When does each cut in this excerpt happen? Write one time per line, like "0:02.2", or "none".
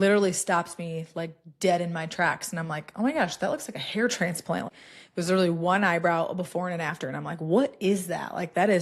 0:04.7